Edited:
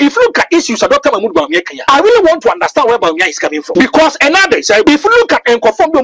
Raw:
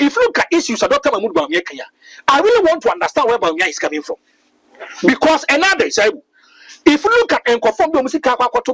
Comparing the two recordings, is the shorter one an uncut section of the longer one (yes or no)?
no